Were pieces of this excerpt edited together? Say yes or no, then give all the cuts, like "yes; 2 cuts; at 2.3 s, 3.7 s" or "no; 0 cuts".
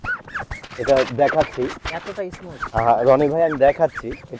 no; 0 cuts